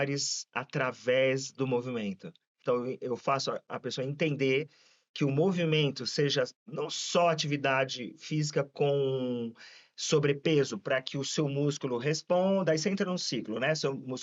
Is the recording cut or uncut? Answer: cut